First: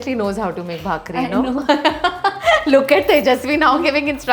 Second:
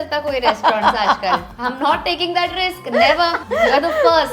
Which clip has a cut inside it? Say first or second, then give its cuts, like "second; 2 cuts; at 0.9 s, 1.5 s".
second; 2 cuts; at 1.5 s, 3.4 s